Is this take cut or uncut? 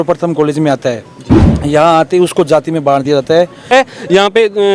cut